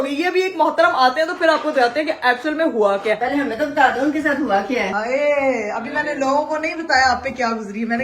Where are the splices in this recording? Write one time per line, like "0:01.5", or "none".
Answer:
0:03.2
0:04.9